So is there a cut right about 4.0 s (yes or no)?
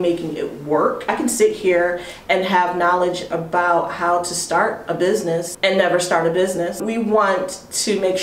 no